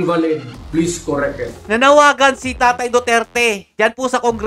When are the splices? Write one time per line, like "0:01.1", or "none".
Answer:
0:01.6